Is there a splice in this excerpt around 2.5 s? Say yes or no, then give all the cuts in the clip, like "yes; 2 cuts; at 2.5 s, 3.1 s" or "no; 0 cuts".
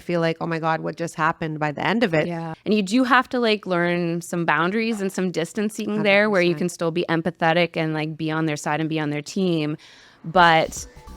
yes; 1 cut; at 2.5 s